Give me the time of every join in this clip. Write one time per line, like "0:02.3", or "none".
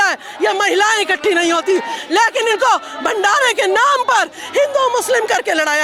none